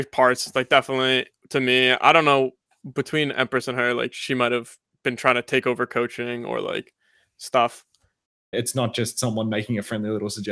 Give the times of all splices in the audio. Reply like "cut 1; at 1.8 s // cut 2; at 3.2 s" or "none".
cut 1; at 8.5 s